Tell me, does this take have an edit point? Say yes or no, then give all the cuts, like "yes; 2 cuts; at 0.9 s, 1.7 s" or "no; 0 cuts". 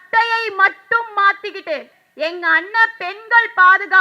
yes; 1 cut; at 2.0 s